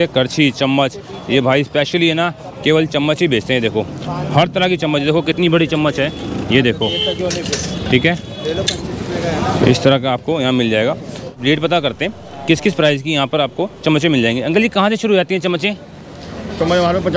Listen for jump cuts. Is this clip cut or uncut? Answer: uncut